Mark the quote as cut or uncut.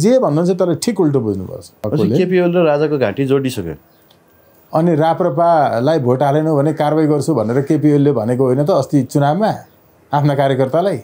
cut